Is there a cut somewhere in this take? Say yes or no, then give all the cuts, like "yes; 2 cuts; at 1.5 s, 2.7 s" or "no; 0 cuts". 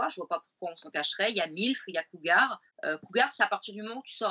yes; 1 cut; at 2.7 s